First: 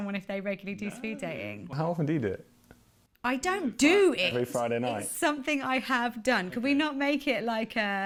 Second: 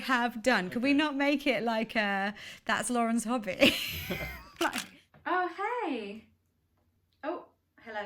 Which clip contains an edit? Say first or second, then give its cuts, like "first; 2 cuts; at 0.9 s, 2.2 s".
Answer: second; 1 cut; at 4.8 s